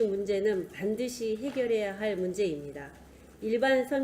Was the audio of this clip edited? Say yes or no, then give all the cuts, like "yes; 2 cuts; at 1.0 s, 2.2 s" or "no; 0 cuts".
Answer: no; 0 cuts